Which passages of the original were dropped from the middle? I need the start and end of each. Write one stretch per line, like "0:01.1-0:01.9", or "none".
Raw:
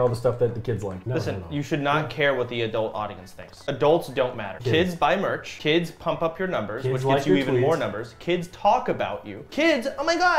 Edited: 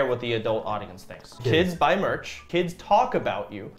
0:03.5-0:04.5
0:05.5-0:08.1